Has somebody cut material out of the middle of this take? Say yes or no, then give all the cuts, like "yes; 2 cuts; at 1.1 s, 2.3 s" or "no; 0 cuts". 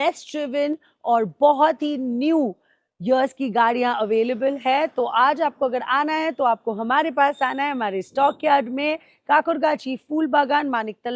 no; 0 cuts